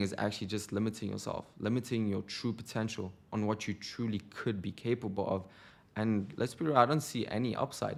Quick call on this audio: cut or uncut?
uncut